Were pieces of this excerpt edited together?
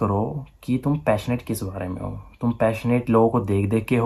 no; 0 cuts

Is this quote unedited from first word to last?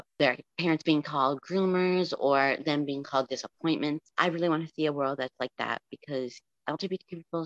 yes; 0 cuts

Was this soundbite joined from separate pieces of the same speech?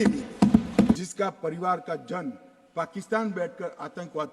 yes; 1 cut; at 1.0 s

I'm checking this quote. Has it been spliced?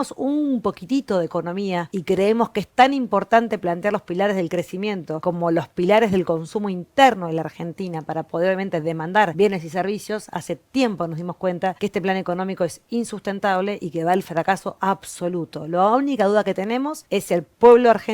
yes; 5 cuts; at 1.9 s, 5.1 s, 9.3 s, 11.8 s, 17.0 s

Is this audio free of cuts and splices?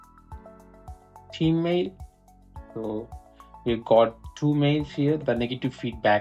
no; 1 cut; at 1.1 s

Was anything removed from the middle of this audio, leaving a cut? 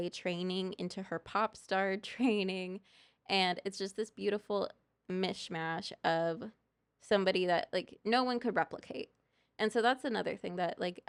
no; 0 cuts

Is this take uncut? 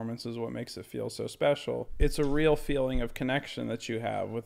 no; 1 cut; at 1.9 s

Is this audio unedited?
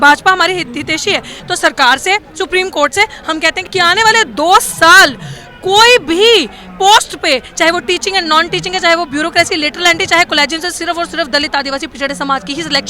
no; 2 cuts; at 1.3 s, 3.6 s

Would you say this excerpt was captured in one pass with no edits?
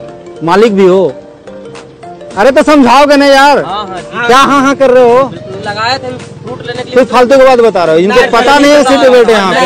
yes; 0 cuts

